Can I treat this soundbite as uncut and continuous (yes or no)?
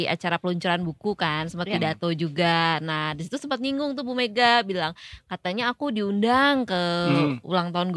yes